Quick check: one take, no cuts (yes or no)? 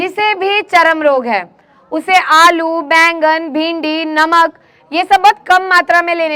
yes